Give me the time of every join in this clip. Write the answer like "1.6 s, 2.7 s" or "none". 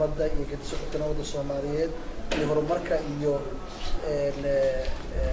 none